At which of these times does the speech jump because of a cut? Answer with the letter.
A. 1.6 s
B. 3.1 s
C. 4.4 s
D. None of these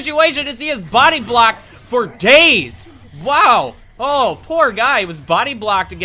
D